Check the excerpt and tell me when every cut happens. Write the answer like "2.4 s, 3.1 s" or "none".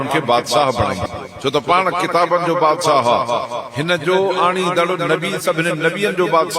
1.2 s